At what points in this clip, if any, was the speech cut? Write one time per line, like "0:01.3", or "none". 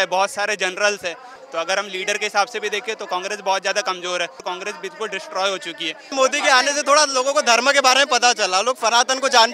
0:01.3
0:04.4
0:06.1